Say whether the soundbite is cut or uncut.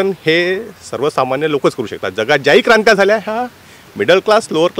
uncut